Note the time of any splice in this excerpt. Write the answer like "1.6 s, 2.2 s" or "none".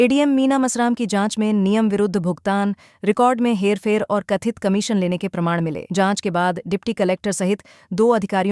none

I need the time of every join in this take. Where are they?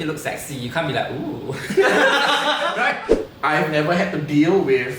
3.0 s

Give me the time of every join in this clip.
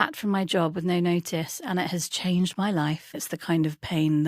3.2 s

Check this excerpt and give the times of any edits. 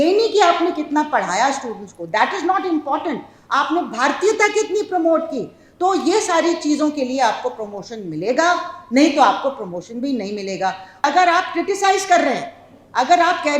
11.0 s

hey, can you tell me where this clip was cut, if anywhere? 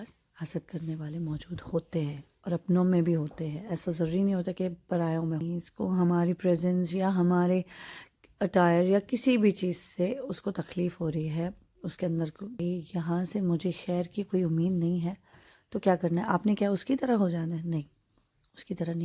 5.5 s, 12.5 s

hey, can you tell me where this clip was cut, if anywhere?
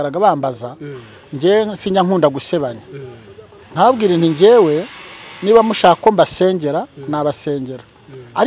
none

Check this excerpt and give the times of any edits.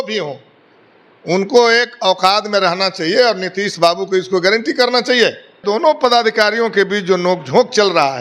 5.6 s

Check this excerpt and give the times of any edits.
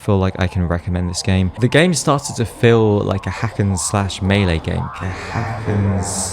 1.5 s, 4.9 s

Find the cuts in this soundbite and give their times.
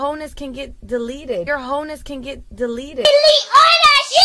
none

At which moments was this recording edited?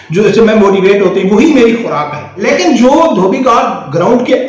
2.4 s

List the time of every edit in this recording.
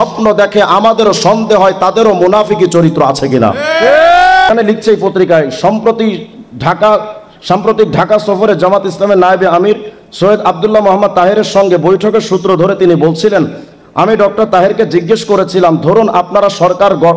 4.5 s

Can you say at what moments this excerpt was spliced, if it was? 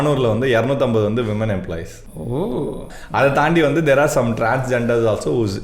3.0 s

